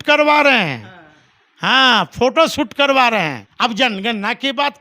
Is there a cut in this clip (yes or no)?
yes